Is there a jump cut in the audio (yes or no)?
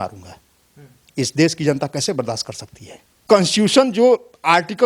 yes